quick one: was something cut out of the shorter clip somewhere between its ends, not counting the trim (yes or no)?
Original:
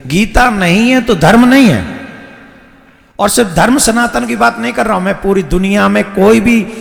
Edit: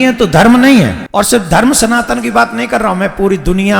yes